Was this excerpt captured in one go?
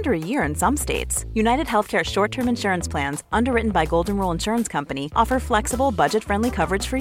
yes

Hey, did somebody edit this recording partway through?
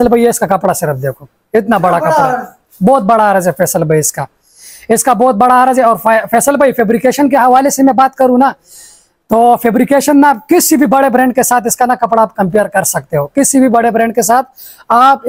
no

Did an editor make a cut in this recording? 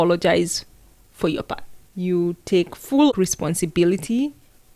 yes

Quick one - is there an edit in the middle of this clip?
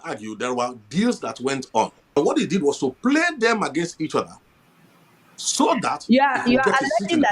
yes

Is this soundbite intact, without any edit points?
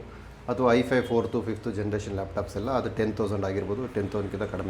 yes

